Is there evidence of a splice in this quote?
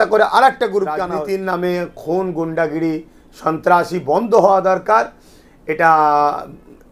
yes; 1 cut; at 1.1 s

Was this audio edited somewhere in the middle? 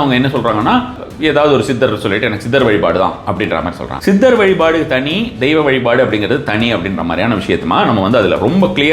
yes; 2 cuts; at 1.0 s, 3.8 s

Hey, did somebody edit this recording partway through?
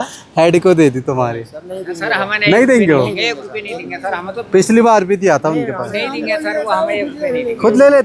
no; 0 cuts

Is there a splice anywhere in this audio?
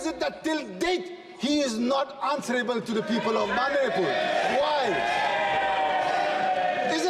no; 0 cuts

